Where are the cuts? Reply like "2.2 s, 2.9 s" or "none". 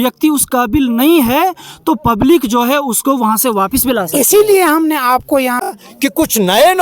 5.7 s